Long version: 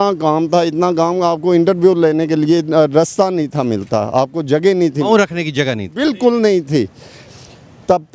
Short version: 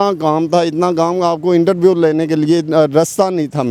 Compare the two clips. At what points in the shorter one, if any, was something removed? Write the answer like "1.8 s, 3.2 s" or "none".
none